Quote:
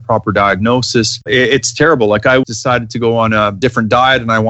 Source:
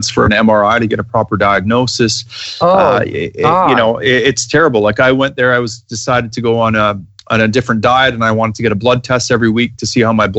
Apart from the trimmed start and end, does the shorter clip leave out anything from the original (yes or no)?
yes